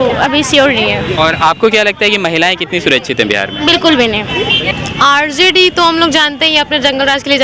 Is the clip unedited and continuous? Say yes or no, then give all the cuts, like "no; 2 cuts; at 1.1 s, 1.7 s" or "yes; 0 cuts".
no; 1 cut; at 4.7 s